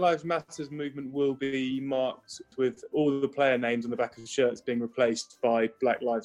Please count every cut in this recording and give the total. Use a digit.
1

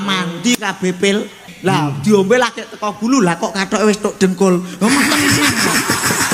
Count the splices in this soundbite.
1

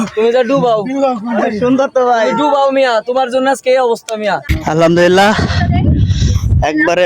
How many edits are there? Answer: 1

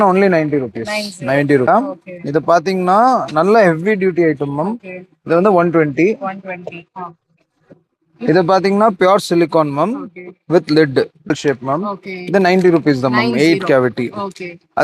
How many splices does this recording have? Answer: 2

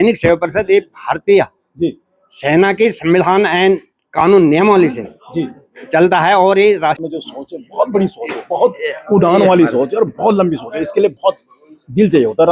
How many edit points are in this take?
1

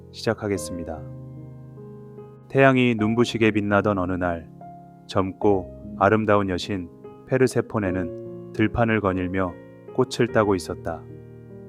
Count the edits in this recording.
2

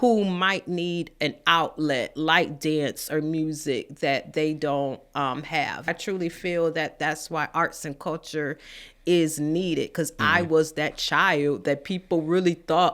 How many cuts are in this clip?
1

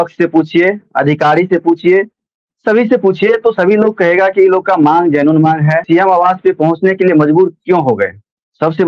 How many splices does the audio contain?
1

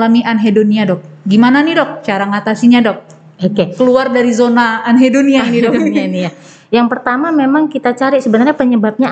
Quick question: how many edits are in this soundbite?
0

